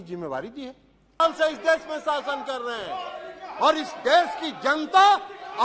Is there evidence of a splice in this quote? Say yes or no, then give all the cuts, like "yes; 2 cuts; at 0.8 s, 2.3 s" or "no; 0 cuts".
yes; 1 cut; at 1.2 s